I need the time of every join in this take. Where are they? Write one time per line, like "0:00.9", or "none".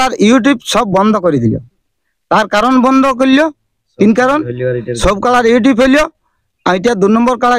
none

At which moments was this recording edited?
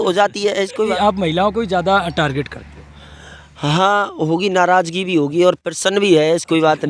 0:00.9

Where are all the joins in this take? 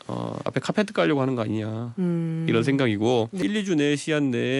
0:03.4

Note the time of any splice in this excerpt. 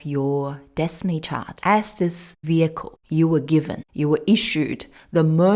0:01.5
0:02.3
0:02.9
0:03.8

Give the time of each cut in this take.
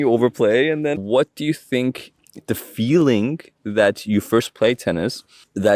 0:01.0

